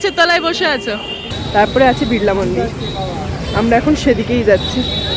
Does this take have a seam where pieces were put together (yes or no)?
yes